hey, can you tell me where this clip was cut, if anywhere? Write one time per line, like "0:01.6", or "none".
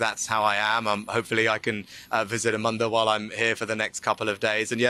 none